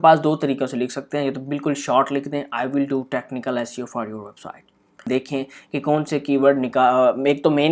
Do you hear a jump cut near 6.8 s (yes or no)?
no